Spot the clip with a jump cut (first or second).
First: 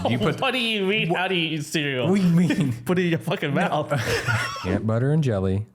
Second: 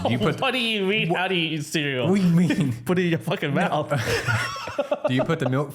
first